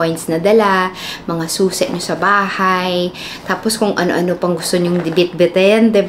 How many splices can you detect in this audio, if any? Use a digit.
0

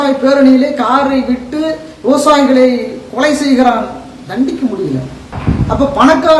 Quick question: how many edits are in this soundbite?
1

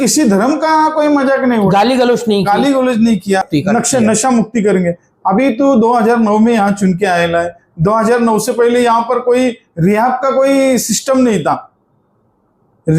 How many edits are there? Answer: 1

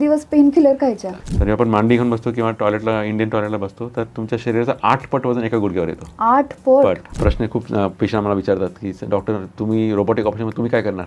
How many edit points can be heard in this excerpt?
2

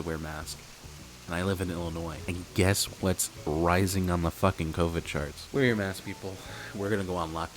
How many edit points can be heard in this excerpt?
2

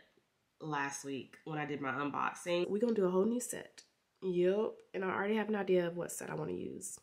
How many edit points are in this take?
1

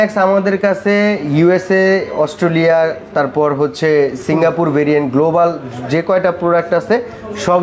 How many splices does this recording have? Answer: 0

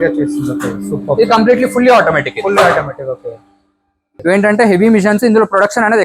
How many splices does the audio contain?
1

